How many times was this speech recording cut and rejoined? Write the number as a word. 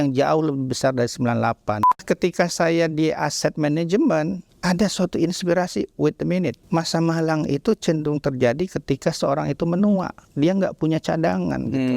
three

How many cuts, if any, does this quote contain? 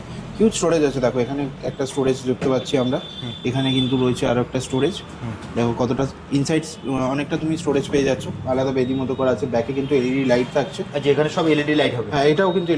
zero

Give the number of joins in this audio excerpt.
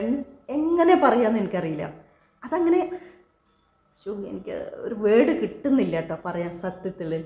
zero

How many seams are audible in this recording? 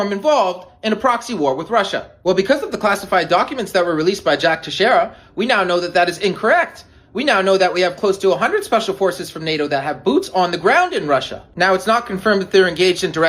three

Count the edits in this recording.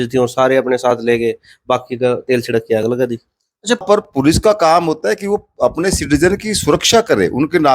one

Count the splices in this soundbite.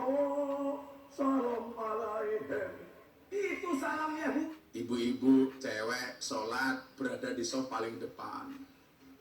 one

